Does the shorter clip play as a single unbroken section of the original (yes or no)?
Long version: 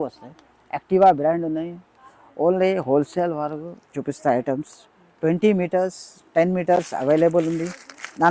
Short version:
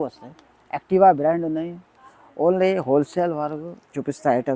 yes